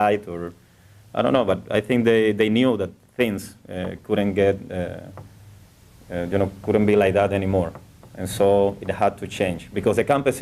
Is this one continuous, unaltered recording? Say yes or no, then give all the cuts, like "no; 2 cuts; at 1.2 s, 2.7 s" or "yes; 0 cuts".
no; 1 cut; at 8.9 s